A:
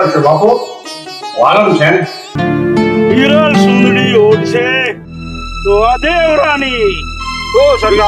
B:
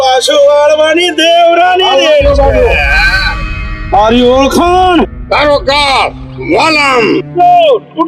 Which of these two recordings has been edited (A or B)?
A